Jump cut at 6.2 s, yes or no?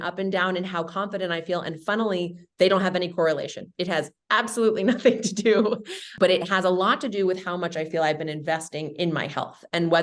no